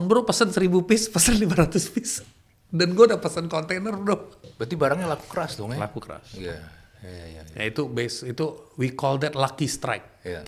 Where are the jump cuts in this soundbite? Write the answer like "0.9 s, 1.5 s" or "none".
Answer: none